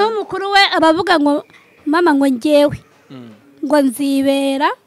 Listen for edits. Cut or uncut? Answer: uncut